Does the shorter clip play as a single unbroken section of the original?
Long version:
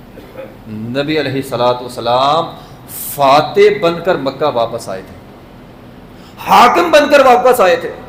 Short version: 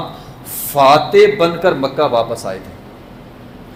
yes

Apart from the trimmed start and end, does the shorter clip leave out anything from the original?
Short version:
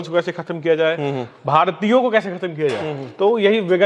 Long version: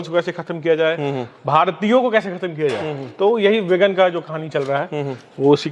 no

